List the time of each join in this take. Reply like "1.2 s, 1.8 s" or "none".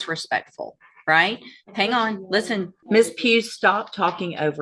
2.8 s